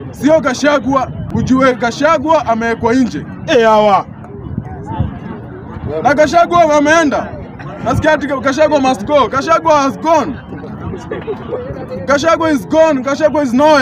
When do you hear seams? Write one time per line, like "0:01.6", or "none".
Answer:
0:01.2